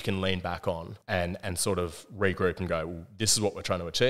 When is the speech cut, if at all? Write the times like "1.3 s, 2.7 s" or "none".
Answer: 0.9 s